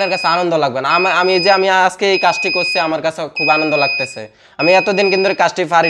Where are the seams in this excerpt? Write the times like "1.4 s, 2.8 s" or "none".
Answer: none